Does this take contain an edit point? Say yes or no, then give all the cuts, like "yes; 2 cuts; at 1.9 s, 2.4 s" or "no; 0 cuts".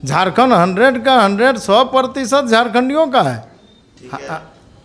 no; 0 cuts